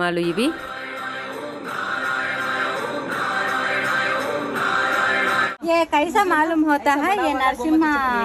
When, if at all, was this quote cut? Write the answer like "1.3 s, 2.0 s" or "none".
5.6 s